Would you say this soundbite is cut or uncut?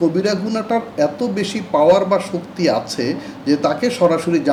uncut